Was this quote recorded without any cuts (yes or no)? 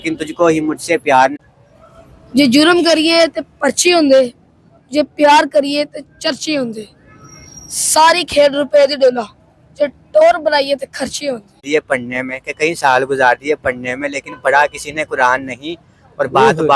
no